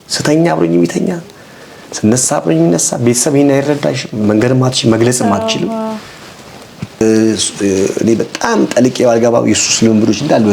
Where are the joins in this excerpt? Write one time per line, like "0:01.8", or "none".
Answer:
0:07.0